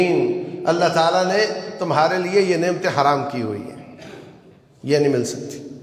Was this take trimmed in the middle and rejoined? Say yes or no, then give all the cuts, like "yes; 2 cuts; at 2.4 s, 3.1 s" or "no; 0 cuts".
no; 0 cuts